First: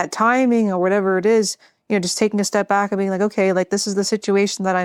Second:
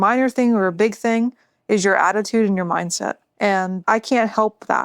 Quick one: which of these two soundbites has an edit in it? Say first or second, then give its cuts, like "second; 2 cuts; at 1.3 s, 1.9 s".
second; 1 cut; at 3.2 s